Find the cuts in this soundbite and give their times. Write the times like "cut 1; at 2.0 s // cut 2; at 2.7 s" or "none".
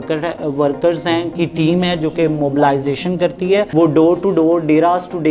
cut 1; at 1.3 s // cut 2; at 3.7 s